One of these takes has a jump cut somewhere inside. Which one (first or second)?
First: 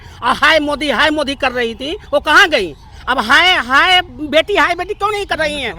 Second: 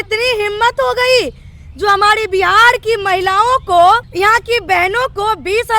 second